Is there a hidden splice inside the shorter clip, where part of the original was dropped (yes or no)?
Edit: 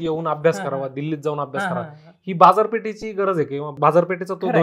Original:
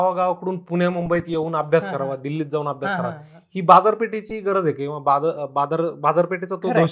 yes